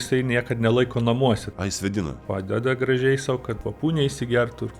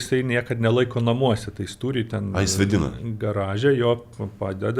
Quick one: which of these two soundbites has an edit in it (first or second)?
first